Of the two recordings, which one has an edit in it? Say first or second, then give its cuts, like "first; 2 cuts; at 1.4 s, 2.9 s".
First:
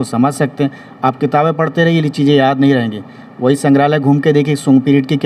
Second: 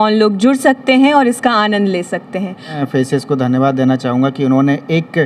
second; 1 cut; at 2.7 s